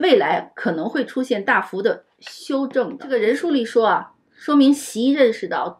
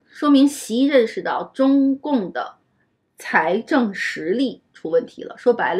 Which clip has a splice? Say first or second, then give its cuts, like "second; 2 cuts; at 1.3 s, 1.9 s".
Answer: first; 1 cut; at 3.0 s